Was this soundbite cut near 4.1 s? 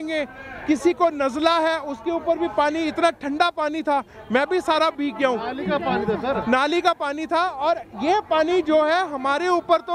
no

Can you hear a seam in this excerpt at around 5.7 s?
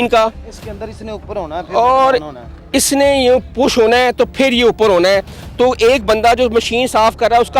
no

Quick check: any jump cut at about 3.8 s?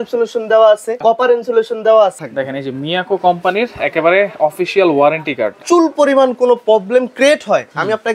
no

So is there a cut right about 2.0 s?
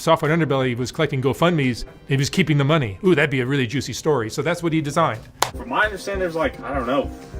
yes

